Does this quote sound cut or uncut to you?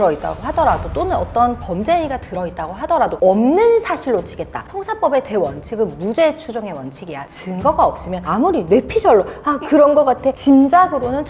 uncut